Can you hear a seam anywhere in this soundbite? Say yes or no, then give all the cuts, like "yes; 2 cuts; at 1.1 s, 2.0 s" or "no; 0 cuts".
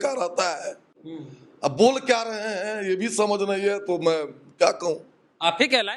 no; 0 cuts